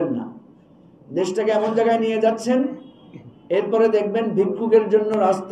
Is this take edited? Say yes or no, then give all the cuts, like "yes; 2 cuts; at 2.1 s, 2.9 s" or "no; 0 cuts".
no; 0 cuts